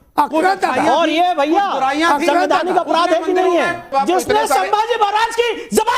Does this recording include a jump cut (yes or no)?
yes